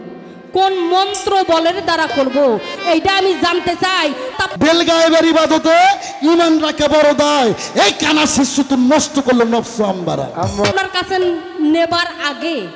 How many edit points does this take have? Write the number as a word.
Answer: two